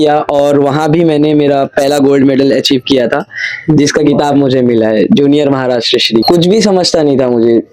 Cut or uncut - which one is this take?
cut